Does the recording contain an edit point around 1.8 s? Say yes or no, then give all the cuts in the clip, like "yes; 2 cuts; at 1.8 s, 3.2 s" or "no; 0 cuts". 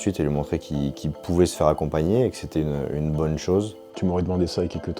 no; 1 cut; at 3.8 s